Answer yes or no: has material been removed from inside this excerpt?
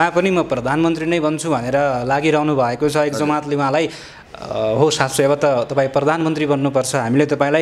no